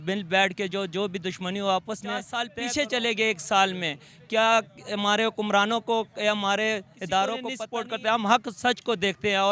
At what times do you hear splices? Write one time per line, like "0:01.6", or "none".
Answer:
0:02.4
0:07.5